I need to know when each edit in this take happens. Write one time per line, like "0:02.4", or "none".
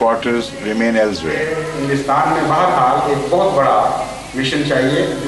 0:01.4